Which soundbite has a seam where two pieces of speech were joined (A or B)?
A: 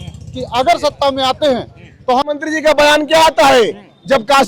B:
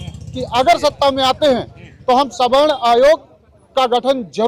A